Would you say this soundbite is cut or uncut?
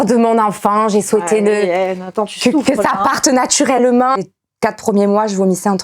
cut